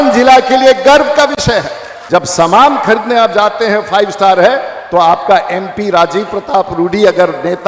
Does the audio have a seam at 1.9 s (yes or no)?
yes